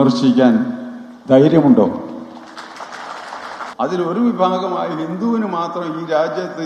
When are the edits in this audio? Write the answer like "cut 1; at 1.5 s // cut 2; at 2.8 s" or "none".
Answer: cut 1; at 3.7 s